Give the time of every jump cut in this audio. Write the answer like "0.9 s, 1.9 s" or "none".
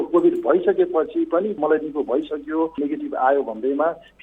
1.6 s, 2.8 s